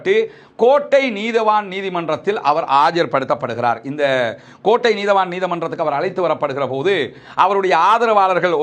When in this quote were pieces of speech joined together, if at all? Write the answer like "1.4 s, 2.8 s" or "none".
none